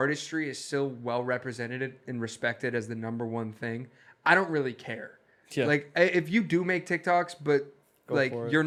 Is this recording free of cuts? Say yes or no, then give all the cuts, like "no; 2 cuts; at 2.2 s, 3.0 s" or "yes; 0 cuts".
yes; 0 cuts